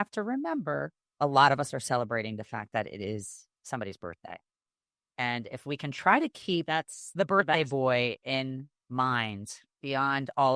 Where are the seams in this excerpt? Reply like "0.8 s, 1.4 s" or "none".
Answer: 1.0 s